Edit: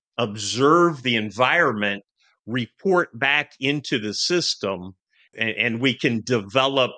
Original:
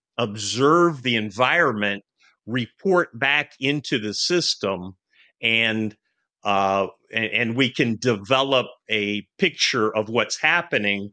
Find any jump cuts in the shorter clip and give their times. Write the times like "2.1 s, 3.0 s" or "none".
5.3 s